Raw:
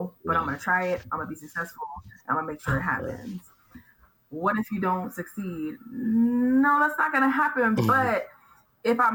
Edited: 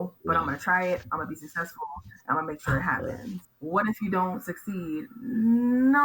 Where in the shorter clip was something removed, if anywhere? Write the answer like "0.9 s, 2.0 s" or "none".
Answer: 3.5 s